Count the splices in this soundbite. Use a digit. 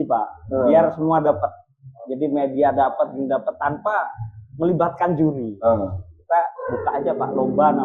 0